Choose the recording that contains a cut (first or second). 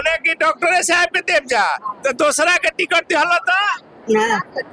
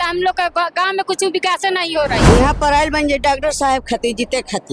second